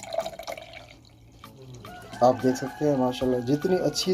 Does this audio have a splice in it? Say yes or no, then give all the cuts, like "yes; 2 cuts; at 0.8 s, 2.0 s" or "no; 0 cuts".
no; 0 cuts